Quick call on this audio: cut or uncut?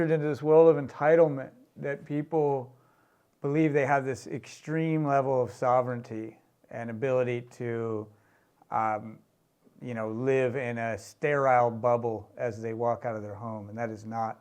uncut